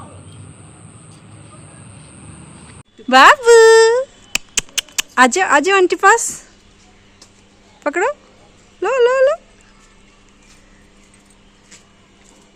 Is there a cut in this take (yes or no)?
no